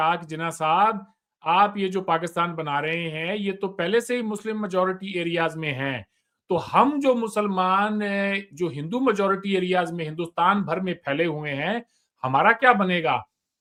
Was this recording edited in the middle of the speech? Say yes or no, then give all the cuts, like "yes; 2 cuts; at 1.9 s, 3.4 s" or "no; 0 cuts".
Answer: no; 0 cuts